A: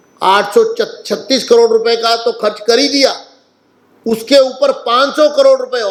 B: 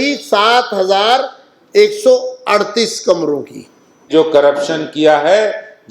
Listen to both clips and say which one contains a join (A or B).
B